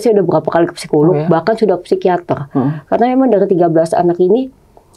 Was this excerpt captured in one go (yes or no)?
yes